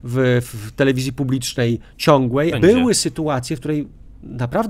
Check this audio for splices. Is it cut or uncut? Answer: cut